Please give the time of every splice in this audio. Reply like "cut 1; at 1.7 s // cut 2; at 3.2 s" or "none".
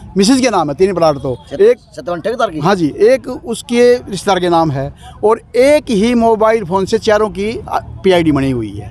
none